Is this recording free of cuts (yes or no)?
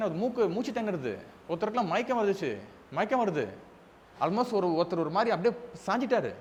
yes